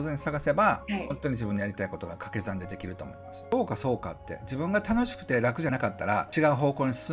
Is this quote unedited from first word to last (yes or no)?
no